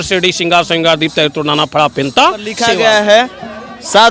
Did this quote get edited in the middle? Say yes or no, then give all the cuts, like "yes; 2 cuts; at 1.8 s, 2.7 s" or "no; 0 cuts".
yes; 1 cut; at 2.5 s